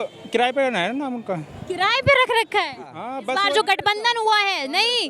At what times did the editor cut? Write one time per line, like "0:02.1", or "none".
0:03.3